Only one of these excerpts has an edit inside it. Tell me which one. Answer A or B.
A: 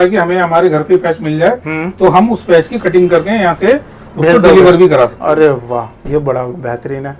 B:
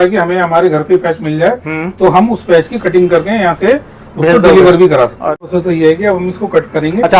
B